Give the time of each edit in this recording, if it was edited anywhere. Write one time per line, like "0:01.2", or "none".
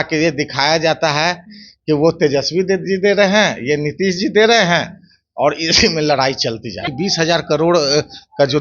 0:06.9